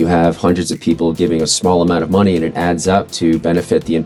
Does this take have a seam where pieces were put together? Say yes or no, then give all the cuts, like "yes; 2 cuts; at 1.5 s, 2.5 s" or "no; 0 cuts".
no; 0 cuts